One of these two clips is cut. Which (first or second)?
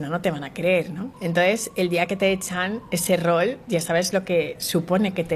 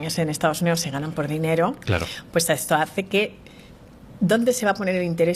first